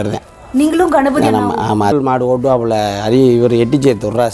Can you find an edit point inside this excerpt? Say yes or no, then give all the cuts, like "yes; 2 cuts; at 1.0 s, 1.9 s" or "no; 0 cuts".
yes; 1 cut; at 1.9 s